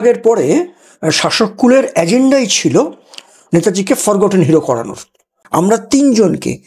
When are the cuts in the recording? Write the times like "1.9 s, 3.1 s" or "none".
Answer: 5.3 s